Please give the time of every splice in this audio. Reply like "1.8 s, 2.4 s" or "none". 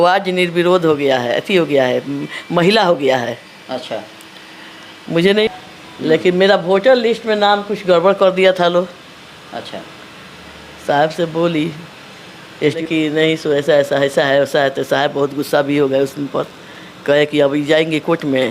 5.5 s, 12.8 s